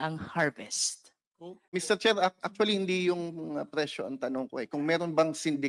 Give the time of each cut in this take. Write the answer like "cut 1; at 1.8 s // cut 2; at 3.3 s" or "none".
cut 1; at 1.6 s